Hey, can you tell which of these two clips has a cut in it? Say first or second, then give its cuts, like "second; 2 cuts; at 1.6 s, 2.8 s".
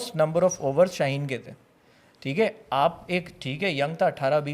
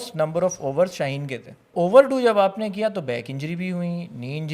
second; 1 cut; at 1.7 s